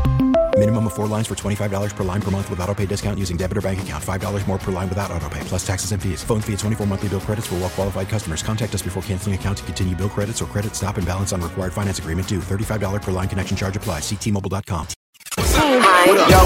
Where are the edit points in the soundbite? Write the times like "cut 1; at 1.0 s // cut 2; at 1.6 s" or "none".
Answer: cut 1; at 15.0 s